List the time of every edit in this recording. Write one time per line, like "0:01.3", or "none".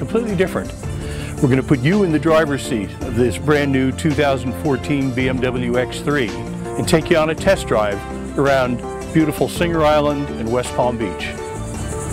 0:06.5